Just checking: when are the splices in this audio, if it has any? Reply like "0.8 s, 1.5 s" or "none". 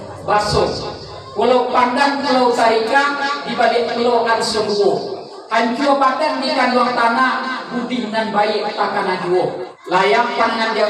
9.7 s